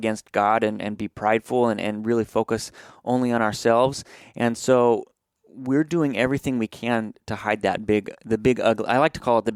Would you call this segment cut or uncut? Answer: uncut